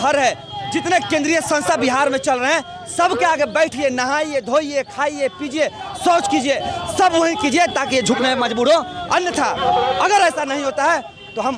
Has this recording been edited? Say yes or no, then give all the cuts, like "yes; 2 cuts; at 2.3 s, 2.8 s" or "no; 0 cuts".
no; 0 cuts